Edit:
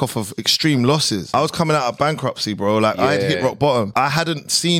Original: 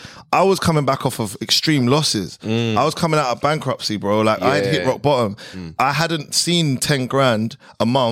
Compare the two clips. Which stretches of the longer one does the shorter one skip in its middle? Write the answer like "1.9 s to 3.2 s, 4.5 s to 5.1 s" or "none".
2.3 s to 2.7 s, 5.3 s to 5.7 s